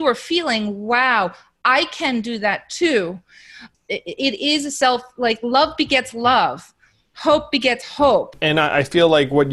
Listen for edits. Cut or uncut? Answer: cut